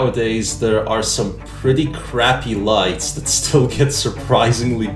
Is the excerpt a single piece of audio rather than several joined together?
yes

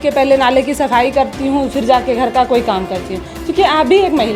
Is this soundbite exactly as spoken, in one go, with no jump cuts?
yes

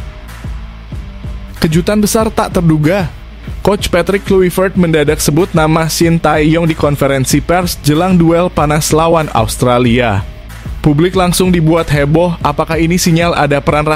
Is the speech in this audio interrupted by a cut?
yes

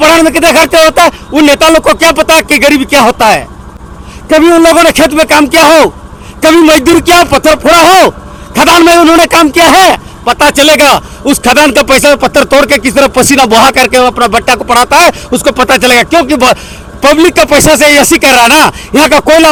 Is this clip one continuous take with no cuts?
yes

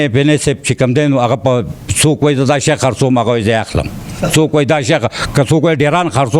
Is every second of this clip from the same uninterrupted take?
yes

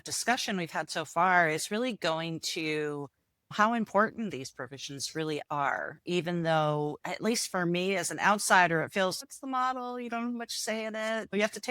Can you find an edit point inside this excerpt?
yes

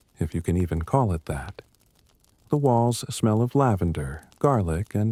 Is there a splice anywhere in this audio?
no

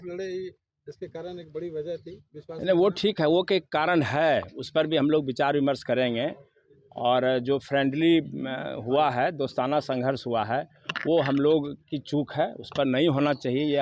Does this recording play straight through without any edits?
yes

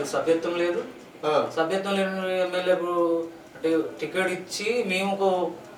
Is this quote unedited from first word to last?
yes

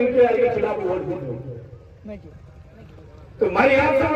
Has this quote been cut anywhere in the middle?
no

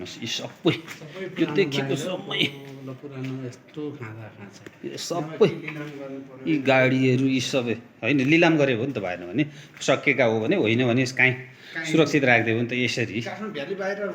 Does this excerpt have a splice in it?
no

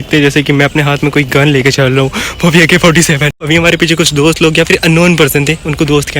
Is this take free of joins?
no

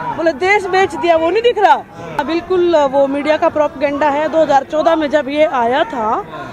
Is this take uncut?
no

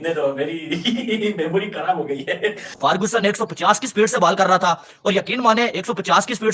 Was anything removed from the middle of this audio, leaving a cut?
yes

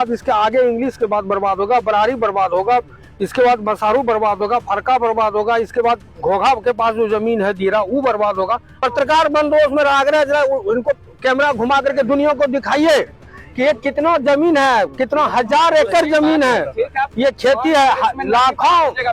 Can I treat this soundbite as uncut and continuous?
no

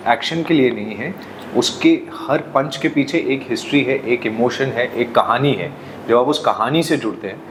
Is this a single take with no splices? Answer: yes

